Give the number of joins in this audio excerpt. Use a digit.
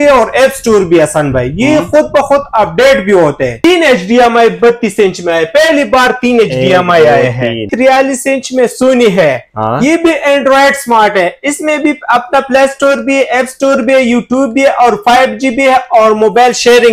2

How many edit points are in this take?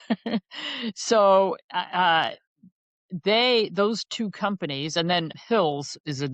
1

